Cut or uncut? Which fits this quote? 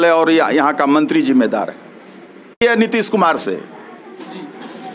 cut